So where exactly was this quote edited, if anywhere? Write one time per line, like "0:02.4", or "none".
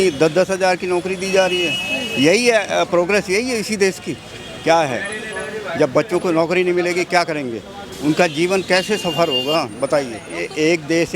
0:10.2